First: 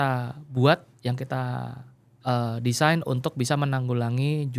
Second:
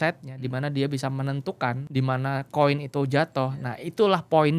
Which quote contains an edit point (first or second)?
second